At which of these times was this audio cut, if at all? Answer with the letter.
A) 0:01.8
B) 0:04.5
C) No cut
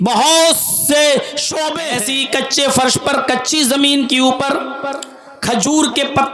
A